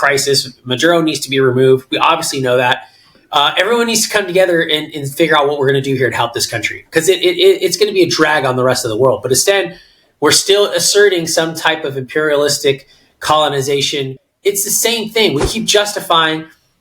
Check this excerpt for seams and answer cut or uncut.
cut